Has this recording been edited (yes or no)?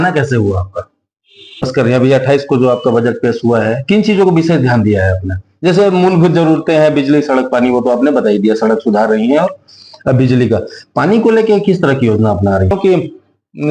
yes